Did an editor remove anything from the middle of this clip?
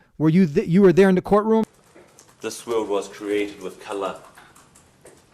yes; 1 cut; at 1.6 s

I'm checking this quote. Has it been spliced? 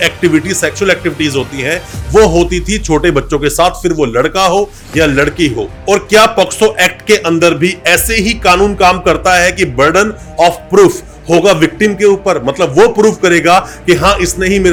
no; 0 cuts

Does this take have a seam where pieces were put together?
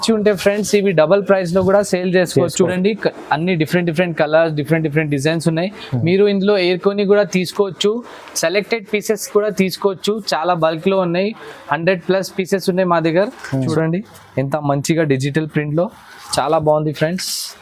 yes; 2 cuts; at 2.7 s, 13.7 s

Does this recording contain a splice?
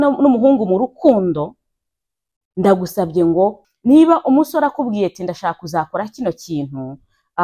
yes; 1 cut; at 3.6 s

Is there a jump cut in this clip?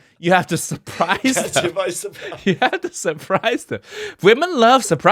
no; 0 cuts

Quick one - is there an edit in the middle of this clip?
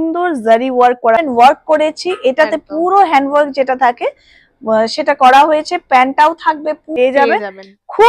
yes; 2 cuts; at 1.2 s, 6.9 s

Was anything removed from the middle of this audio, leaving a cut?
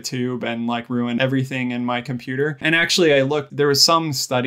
yes; 3 cuts; at 1.2 s, 2.6 s, 3.5 s

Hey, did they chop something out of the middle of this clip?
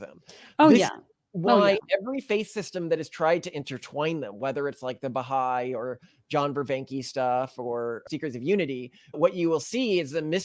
yes; 1 cut; at 8.0 s

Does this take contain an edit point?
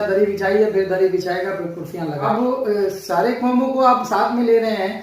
yes; 1 cut; at 2.2 s

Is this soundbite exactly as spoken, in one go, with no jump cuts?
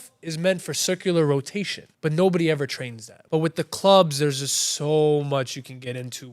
no; 2 cuts; at 1.8 s, 3.1 s

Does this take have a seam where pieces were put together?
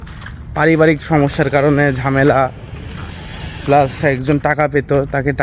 no; 0 cuts

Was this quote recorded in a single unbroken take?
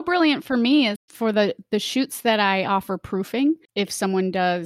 no; 2 cuts; at 1.0 s, 3.7 s

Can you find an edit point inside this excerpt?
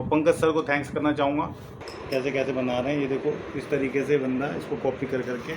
yes; 1 cut; at 1.7 s

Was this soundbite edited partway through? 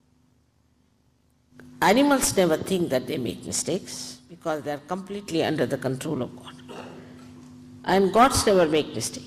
no; 0 cuts

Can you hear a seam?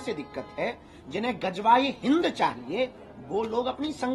no; 0 cuts

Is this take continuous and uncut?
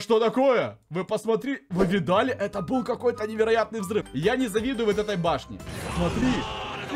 no; 1 cut; at 4.1 s

